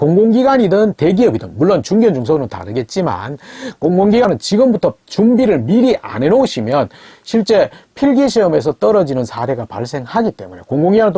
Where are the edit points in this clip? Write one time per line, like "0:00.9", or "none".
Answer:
0:04.2